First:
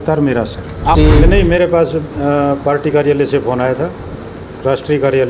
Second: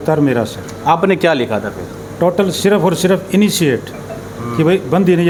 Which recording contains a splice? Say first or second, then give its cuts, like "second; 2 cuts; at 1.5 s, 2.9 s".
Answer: first; 1 cut; at 1.0 s